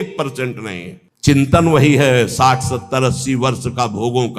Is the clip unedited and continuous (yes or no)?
no